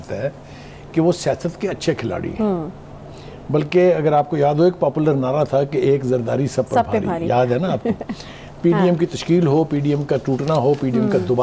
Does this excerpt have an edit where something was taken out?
no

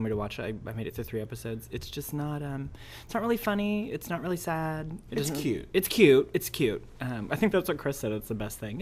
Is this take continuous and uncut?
no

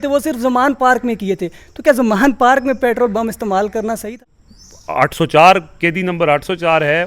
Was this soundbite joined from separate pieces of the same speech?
yes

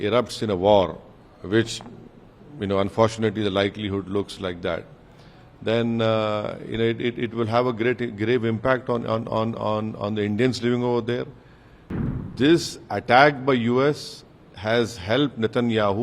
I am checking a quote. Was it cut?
yes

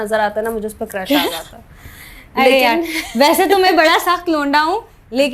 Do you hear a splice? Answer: no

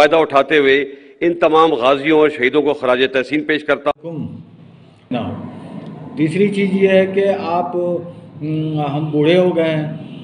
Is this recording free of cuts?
no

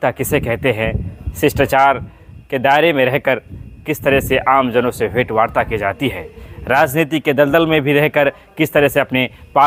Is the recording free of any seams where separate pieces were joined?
yes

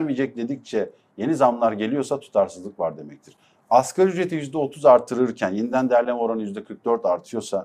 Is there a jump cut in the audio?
no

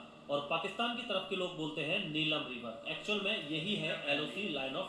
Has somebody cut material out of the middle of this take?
yes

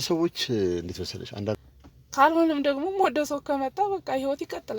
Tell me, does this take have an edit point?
yes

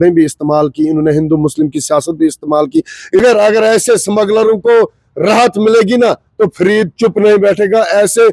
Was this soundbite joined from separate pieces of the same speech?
yes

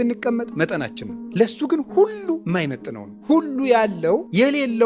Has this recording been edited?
no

